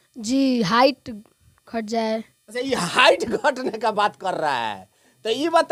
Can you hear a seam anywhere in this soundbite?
no; 0 cuts

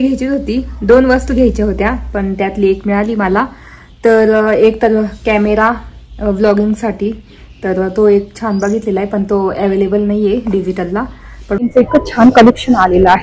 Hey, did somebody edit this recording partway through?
yes; 1 cut; at 11.6 s

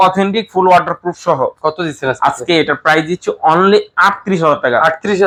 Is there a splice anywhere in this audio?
no; 0 cuts

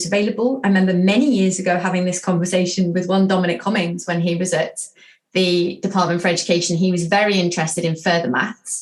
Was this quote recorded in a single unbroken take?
yes; 0 cuts

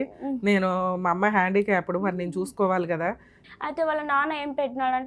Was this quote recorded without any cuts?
no; 1 cut; at 3.4 s

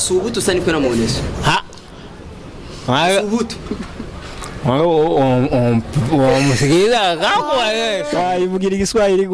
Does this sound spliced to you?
yes; 1 cut; at 8.1 s

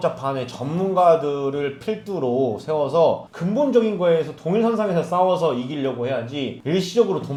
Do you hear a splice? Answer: no; 0 cuts

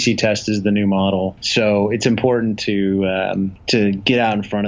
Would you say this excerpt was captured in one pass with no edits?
no; 2 cuts; at 1.4 s, 3.6 s

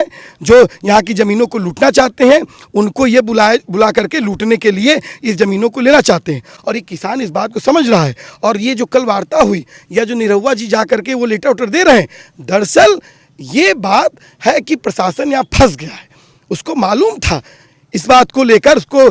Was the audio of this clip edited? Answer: no; 0 cuts

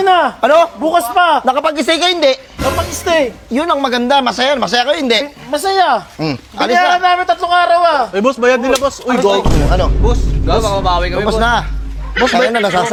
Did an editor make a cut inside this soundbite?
no; 0 cuts

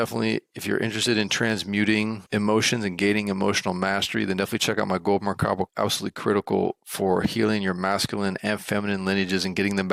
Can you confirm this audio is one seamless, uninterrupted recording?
yes; 0 cuts

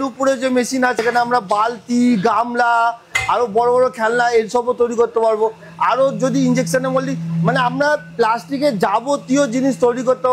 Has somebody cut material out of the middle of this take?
yes; 1 cut; at 1.0 s

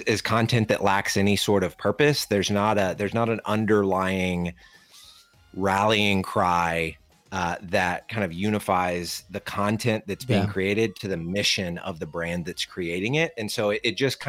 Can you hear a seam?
no; 0 cuts

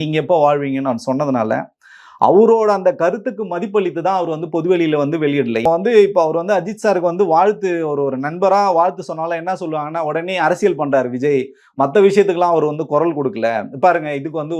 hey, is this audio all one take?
no; 1 cut; at 5.6 s

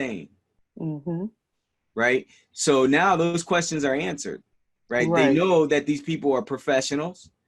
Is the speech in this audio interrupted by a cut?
no; 0 cuts

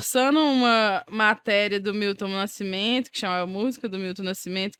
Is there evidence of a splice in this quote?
no; 0 cuts

